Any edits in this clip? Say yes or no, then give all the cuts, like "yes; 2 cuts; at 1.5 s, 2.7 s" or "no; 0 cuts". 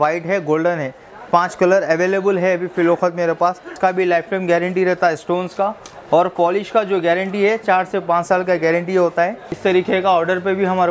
yes; 2 cuts; at 3.7 s, 9.5 s